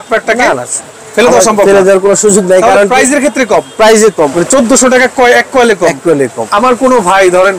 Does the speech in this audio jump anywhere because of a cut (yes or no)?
yes